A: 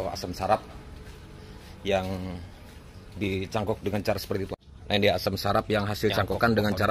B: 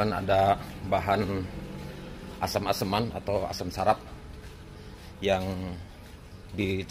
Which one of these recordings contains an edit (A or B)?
A